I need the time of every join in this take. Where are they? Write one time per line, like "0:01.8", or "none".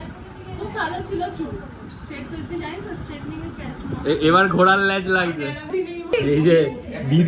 0:05.7